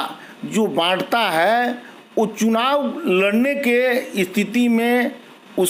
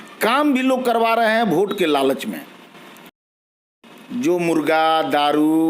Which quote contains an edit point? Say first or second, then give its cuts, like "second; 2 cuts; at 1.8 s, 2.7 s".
second; 1 cut; at 3.3 s